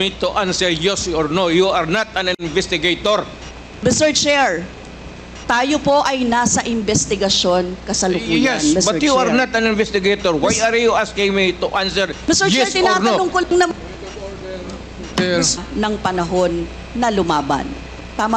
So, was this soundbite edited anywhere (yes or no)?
yes